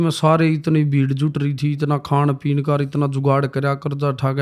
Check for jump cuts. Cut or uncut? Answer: uncut